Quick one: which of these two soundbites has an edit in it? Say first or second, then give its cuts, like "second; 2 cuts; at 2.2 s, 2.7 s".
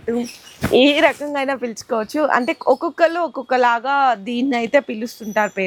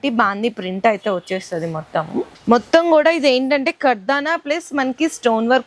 second; 1 cut; at 2.3 s